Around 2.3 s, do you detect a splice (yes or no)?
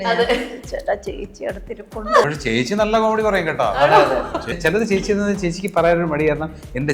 yes